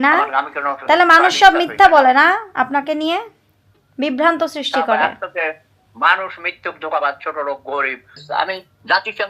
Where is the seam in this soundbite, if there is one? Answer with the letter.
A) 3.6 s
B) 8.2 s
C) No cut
B